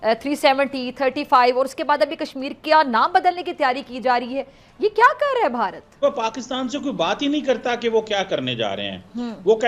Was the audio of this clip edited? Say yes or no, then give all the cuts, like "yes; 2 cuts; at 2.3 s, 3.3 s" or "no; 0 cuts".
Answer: yes; 1 cut; at 6.0 s